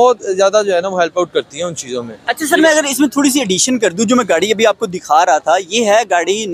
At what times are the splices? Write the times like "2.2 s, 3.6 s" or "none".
none